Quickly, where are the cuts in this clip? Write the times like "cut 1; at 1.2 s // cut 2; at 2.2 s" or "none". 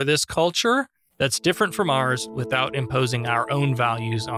none